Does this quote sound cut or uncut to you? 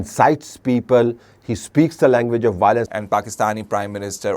cut